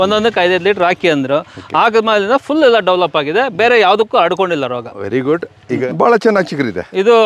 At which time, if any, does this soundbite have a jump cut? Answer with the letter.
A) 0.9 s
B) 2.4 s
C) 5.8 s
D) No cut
C